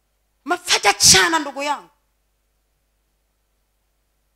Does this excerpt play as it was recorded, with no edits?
yes; 0 cuts

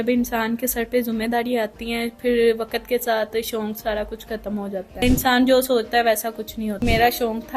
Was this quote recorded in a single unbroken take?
no; 2 cuts; at 5.0 s, 6.8 s

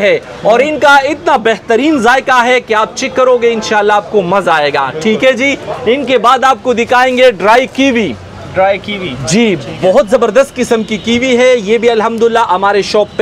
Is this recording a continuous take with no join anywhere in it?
yes; 0 cuts

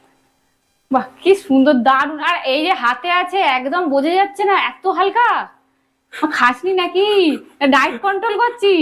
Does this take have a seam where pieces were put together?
no; 0 cuts

